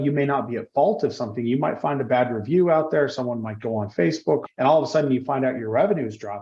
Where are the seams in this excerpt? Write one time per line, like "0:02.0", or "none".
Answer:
0:04.4